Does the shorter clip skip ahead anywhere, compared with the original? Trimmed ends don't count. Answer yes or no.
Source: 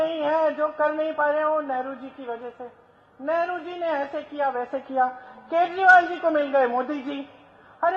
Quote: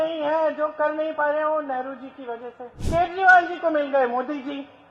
yes